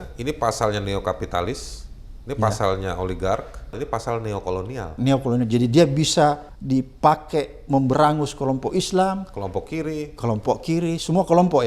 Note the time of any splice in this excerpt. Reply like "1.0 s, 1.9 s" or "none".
0.9 s, 3.8 s, 6.5 s